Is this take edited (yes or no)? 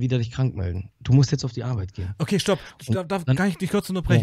no